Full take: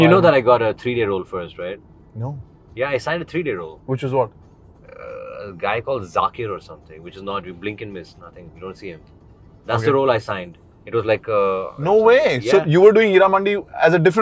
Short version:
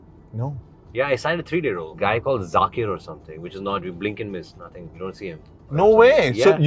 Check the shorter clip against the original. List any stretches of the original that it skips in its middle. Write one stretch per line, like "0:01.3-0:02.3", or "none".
0:03.7-0:05.5
0:09.3-0:11.7